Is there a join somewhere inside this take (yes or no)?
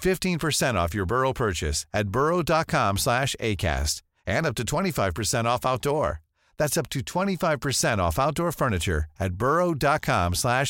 no